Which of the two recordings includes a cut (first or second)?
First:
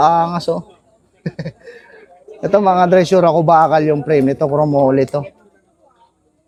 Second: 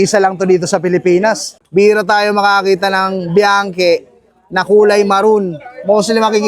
second